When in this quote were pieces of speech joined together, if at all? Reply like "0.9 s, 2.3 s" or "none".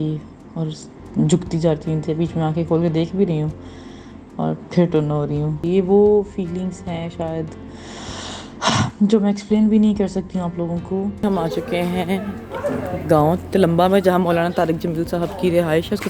5.6 s, 11.2 s